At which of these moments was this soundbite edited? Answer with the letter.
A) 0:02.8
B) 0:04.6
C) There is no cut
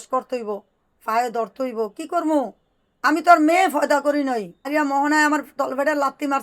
B